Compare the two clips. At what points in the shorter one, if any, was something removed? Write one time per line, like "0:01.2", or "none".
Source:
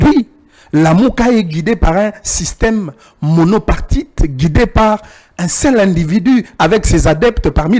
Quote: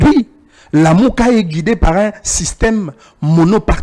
none